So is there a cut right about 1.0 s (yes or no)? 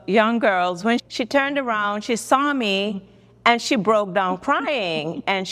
yes